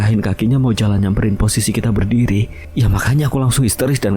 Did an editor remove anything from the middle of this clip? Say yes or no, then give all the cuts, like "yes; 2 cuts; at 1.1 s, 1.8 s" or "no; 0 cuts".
yes; 1 cut; at 2.6 s